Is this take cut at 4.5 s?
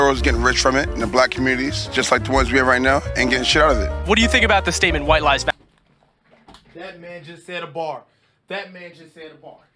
no; 0 cuts

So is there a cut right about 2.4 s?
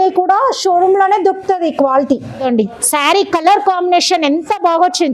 yes; 1 cut; at 2.4 s

